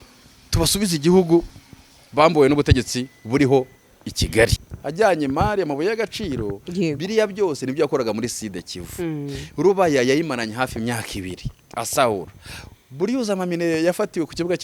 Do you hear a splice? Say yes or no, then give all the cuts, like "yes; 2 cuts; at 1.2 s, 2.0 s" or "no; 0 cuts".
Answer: yes; 1 cut; at 4.6 s